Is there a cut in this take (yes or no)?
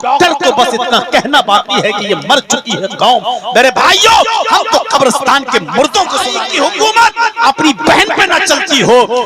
yes